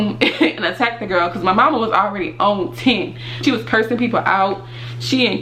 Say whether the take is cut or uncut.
cut